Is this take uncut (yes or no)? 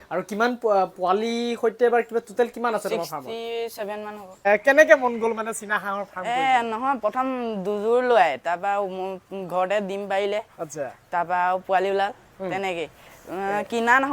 no